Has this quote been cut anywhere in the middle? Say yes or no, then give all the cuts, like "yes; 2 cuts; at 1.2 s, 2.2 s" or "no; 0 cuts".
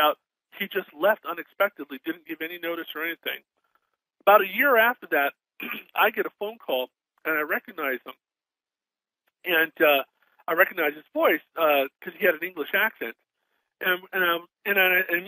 yes; 1 cut; at 13.7 s